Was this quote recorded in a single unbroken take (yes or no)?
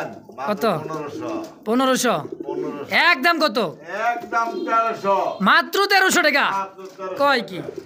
yes